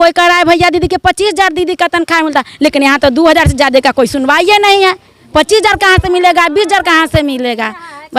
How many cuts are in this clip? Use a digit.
0